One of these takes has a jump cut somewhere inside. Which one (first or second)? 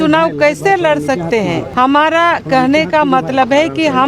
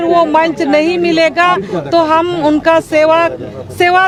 first